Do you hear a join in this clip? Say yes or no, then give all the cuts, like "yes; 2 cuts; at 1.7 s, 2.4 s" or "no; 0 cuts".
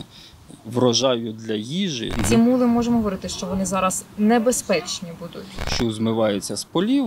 yes; 2 cuts; at 2.2 s, 5.7 s